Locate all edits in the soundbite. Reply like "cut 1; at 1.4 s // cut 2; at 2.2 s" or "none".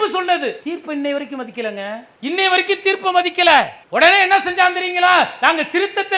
cut 1; at 2.1 s // cut 2; at 3.8 s